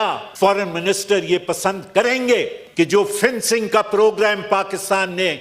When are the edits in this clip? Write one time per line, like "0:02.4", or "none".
0:02.6